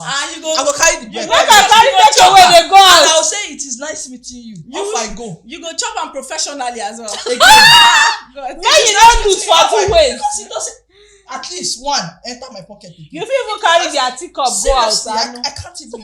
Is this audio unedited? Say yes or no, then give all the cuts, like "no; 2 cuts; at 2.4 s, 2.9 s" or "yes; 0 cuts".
yes; 0 cuts